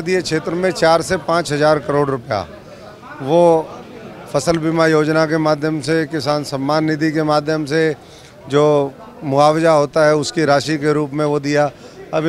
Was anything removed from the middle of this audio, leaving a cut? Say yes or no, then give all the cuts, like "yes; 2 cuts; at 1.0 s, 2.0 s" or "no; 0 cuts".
no; 0 cuts